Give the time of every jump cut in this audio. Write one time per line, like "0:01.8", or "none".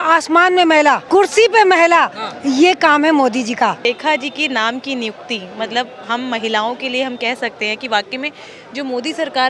0:01.0
0:03.8